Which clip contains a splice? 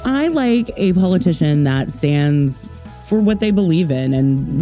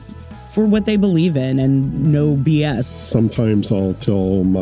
second; 1 cut; at 3.0 s

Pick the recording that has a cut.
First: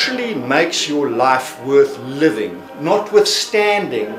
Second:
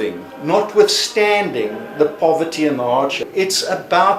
second; 1 cut; at 3.2 s

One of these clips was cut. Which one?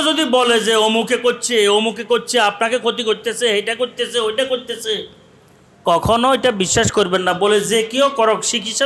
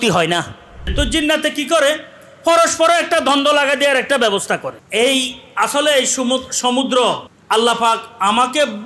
second; 3 cuts; at 0.9 s, 4.8 s, 7.3 s

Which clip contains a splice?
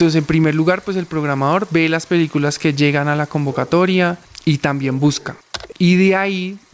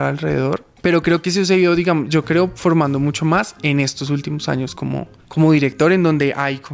first; 1 cut; at 5.5 s

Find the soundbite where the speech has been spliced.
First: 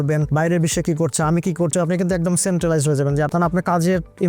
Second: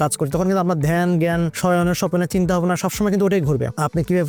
first; 2 cuts; at 1.7 s, 3.3 s

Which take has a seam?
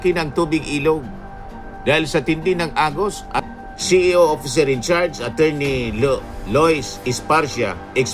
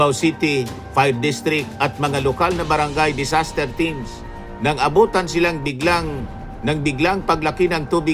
first; 1 cut; at 3.5 s

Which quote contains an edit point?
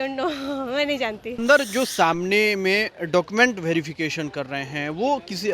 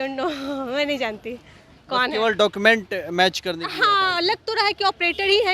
first; 1 cut; at 1.4 s

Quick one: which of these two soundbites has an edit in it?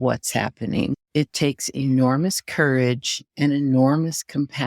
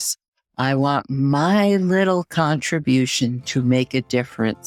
first; 1 cut; at 1.0 s

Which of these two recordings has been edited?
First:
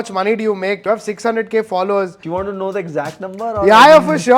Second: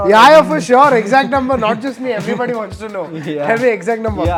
first; 2 cuts; at 0.8 s, 2.2 s

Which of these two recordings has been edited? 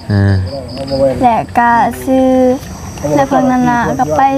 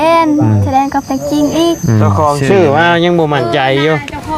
second; 1 cut; at 2.1 s

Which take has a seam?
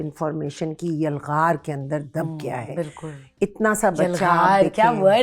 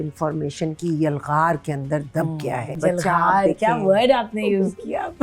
second; 1 cut; at 2.8 s

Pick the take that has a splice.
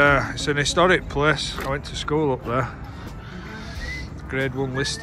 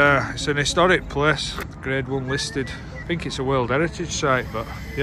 second; 2 cuts; at 1.5 s, 2.9 s

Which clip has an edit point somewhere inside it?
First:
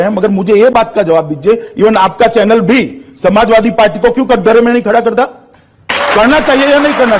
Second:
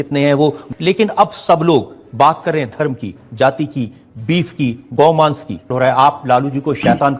second; 1 cut; at 5.7 s

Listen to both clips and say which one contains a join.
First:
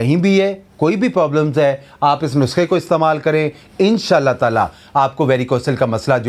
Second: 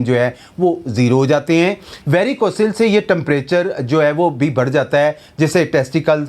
second; 1 cut; at 1.9 s

